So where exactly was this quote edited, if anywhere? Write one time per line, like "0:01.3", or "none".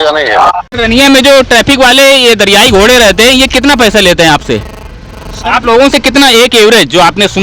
0:01.0